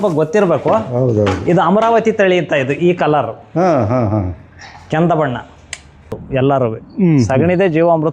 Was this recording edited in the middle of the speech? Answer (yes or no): yes